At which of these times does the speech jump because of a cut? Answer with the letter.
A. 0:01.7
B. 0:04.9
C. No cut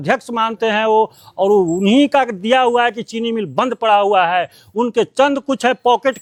C